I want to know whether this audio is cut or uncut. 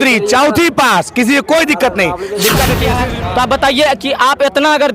cut